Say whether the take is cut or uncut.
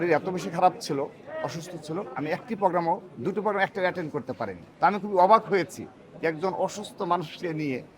cut